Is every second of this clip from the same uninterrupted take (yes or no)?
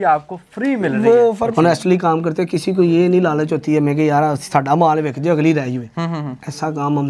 no